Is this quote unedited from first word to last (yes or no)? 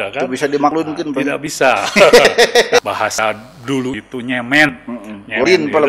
no